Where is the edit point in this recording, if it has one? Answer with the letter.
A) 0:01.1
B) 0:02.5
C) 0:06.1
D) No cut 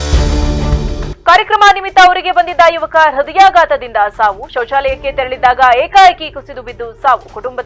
D